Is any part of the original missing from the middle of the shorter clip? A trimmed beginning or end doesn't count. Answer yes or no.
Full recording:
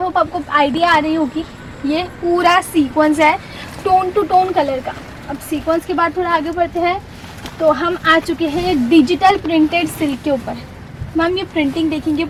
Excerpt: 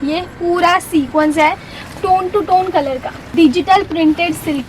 yes